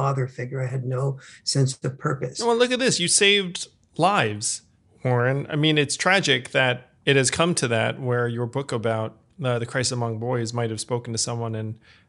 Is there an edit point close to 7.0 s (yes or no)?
no